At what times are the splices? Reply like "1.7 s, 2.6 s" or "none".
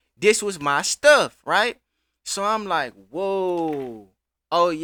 none